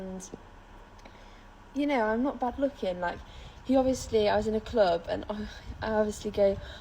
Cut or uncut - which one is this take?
cut